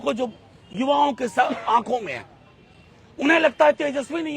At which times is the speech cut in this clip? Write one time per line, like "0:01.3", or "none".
none

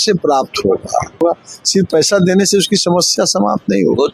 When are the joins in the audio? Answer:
0:01.2

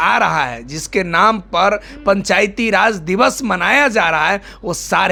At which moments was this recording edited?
none

